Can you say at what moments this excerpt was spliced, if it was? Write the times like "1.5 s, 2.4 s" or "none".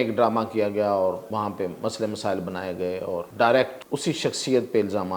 1.2 s, 3.3 s, 3.8 s